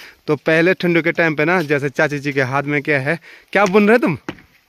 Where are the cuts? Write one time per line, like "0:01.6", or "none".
none